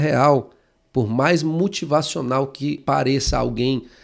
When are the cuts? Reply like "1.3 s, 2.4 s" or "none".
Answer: 2.8 s